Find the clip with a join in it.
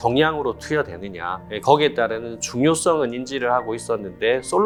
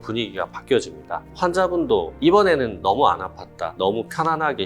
second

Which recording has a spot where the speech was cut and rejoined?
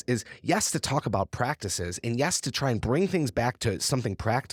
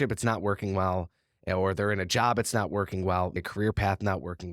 second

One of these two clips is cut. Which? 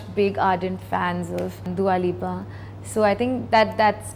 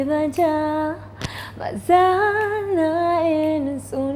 first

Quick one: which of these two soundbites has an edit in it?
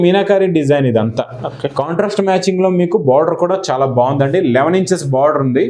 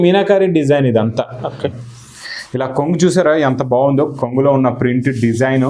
second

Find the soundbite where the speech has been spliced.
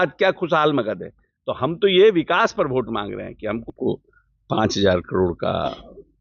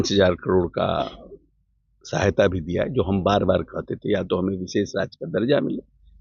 first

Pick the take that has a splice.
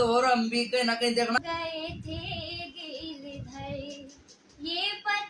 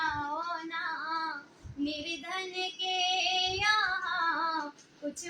first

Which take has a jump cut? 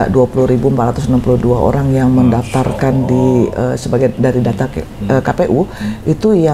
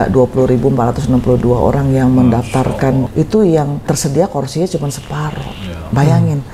second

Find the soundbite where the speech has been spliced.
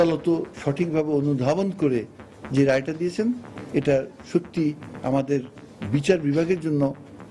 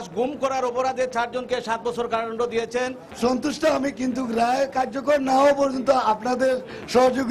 second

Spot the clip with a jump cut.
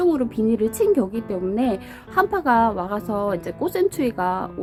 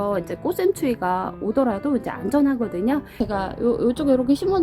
second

